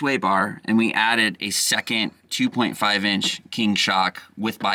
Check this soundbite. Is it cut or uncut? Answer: uncut